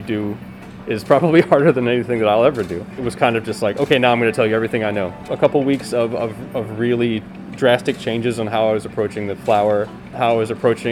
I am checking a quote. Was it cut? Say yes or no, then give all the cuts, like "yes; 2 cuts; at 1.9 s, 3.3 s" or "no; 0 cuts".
yes; 3 cuts; at 3.0 s, 5.3 s, 10.1 s